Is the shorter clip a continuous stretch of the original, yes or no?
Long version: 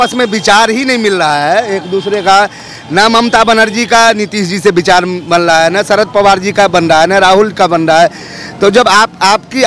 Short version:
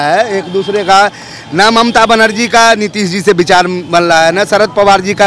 yes